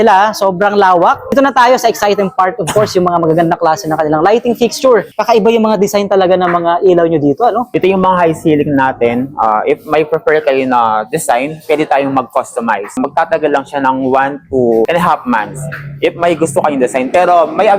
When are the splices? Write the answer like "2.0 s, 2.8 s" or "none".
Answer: 1.3 s, 5.1 s, 13.0 s, 14.9 s